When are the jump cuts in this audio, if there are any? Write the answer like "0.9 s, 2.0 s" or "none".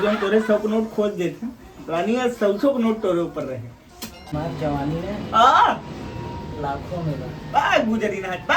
4.3 s